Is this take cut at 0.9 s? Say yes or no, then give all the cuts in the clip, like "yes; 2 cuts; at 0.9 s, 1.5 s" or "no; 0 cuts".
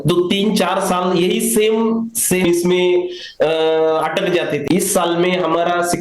no; 2 cuts; at 2.5 s, 4.6 s